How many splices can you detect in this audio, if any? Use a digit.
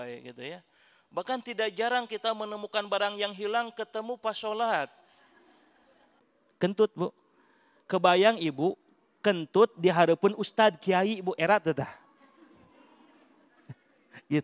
1